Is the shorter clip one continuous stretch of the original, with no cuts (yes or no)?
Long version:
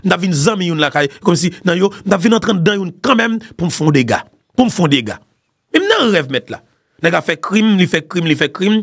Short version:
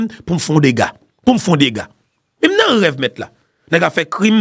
yes